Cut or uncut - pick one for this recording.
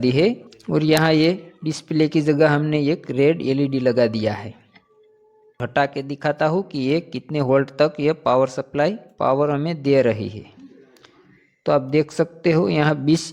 cut